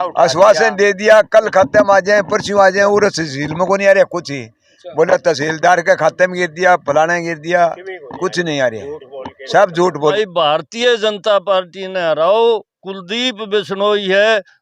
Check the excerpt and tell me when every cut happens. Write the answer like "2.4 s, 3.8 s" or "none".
10.1 s